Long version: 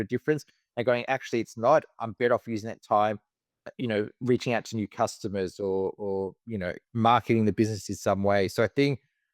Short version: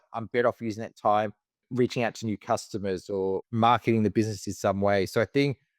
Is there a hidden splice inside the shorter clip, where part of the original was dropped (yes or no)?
yes